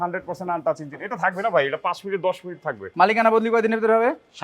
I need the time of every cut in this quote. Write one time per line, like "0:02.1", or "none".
0:02.7

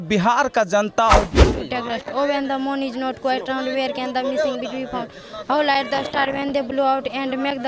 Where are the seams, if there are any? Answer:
0:01.3

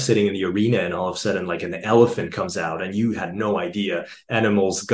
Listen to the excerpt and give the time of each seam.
none

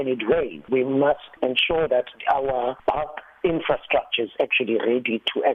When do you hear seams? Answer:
0:01.9

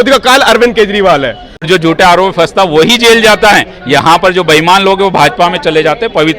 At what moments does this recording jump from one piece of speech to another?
0:01.7

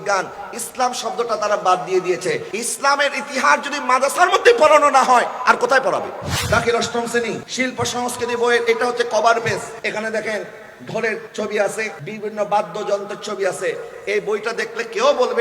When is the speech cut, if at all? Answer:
0:02.5
0:06.3
0:07.5
0:09.7
0:11.3
0:12.0

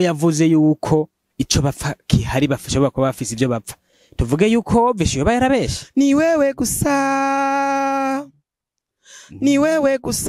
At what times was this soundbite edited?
0:05.8

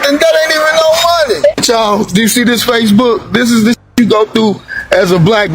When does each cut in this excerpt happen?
0:01.6

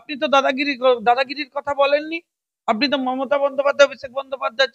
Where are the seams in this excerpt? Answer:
none

